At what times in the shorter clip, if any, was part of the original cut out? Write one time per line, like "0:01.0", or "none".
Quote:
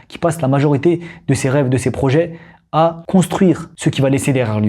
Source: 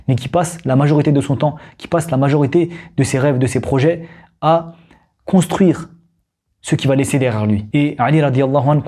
0:03.0
0:03.7